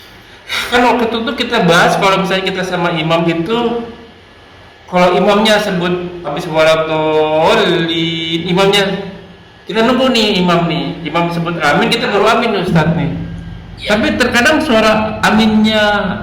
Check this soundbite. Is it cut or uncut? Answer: uncut